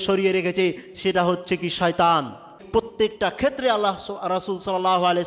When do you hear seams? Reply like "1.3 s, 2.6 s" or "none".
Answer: 2.6 s